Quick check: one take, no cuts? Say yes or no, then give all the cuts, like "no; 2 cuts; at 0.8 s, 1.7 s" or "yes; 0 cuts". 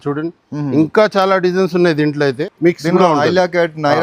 no; 1 cut; at 2.3 s